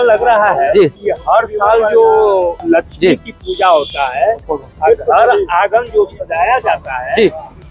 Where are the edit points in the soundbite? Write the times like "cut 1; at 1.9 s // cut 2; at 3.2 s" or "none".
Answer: cut 1; at 1.1 s // cut 2; at 2.6 s

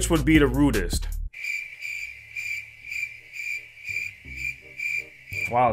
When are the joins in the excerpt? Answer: none

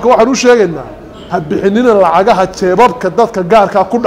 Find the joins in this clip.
none

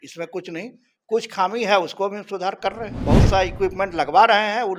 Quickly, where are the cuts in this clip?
cut 1; at 2.9 s

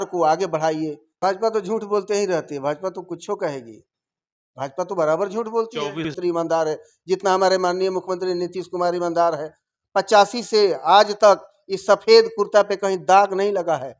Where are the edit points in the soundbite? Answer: cut 1; at 1.1 s // cut 2; at 6.1 s

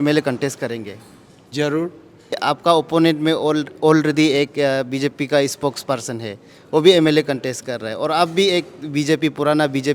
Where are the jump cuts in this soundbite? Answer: cut 1; at 2.4 s

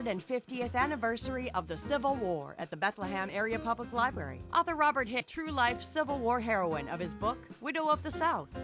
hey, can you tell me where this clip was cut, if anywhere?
cut 1; at 5.3 s

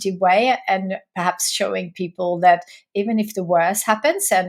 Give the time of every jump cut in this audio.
none

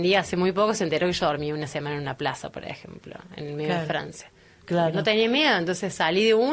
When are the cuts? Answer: none

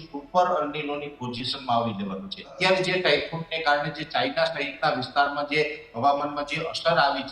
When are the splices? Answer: cut 1; at 2.4 s

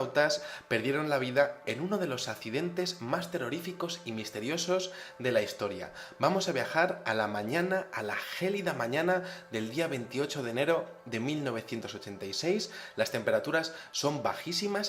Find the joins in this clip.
cut 1; at 9.4 s

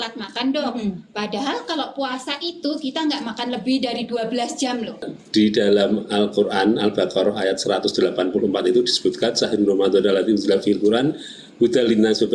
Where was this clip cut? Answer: cut 1; at 5.1 s

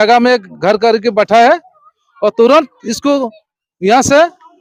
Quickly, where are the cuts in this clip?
none

